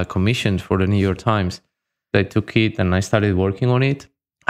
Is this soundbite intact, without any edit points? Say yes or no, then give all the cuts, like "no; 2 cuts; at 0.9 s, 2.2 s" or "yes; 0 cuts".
no; 1 cut; at 2.1 s